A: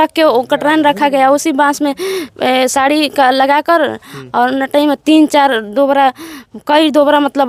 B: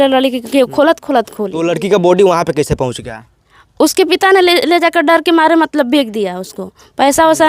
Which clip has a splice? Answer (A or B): B